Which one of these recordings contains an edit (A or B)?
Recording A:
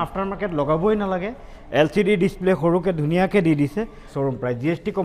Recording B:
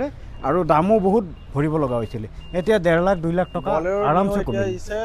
A